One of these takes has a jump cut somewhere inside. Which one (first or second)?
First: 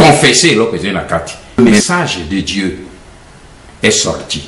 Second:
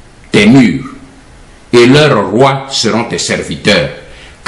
first